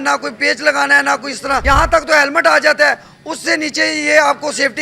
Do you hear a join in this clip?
yes; 1 cut; at 1.6 s

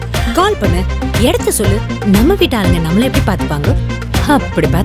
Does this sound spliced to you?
no; 0 cuts

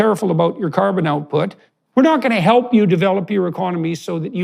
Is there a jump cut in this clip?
yes; 1 cut; at 1.6 s

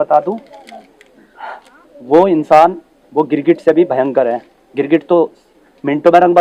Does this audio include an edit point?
no; 0 cuts

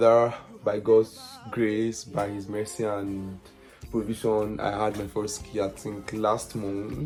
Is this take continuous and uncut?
yes; 0 cuts

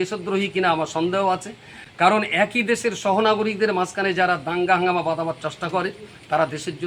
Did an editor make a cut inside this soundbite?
no; 0 cuts

